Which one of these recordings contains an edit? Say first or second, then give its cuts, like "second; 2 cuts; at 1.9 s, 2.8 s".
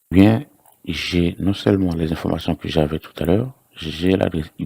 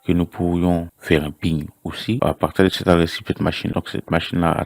second; 2 cuts; at 2.2 s, 3.7 s